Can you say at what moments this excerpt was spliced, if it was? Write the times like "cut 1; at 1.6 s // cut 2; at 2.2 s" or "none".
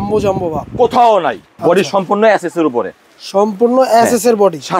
cut 1; at 1.6 s